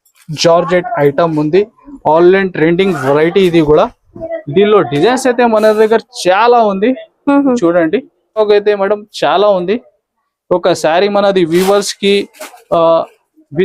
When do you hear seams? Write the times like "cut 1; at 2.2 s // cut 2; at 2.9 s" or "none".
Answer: cut 1; at 8.4 s